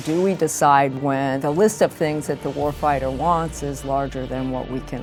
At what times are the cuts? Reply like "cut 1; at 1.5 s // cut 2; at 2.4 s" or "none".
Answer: none